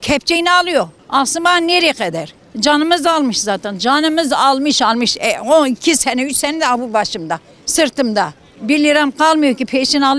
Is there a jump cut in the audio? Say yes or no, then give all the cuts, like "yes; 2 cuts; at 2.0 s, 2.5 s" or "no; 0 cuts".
no; 0 cuts